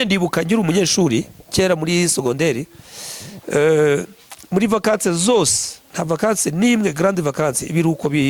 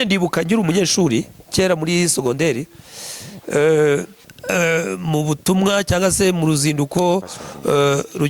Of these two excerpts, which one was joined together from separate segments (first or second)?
second